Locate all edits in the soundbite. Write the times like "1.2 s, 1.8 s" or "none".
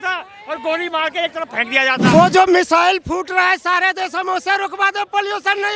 2.1 s